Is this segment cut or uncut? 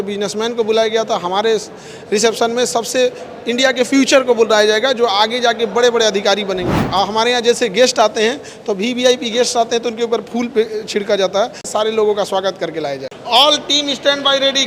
cut